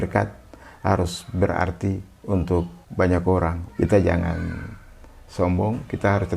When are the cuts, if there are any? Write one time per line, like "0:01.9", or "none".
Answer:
0:02.8
0:03.6